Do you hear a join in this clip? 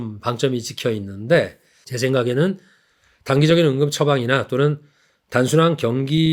yes; 1 cut; at 1.7 s

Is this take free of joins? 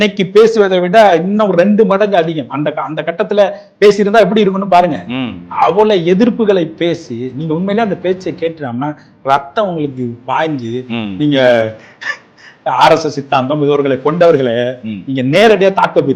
no; 1 cut; at 12.5 s

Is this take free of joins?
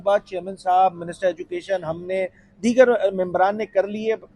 yes; 0 cuts

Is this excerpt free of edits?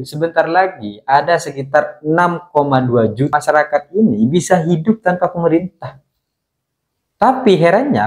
no; 1 cut; at 3.4 s

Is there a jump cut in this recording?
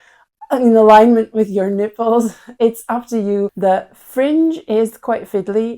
yes; 1 cut; at 3.5 s

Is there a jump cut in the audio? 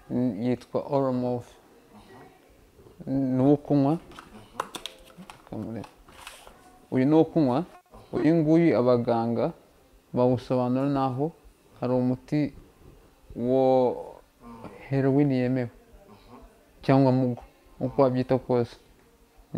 no; 0 cuts

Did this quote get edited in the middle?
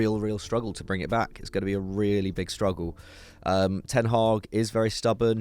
no; 0 cuts

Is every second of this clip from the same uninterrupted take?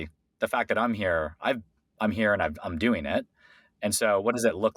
yes; 0 cuts

